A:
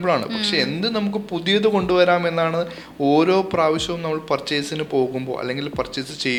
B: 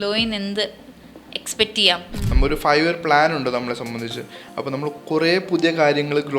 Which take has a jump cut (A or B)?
B